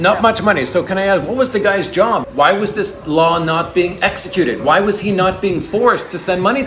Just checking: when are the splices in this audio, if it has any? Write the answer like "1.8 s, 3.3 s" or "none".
2.2 s